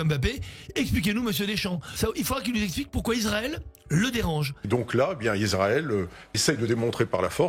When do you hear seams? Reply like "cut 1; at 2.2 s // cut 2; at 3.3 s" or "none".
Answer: cut 1; at 4.6 s // cut 2; at 6.4 s